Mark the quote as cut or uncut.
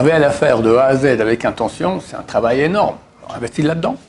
uncut